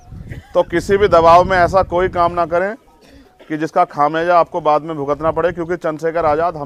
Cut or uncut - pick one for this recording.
uncut